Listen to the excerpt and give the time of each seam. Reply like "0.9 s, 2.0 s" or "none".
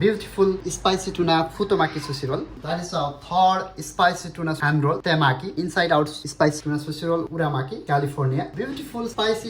8.5 s